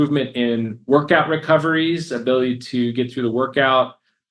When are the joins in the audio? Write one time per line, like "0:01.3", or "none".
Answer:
none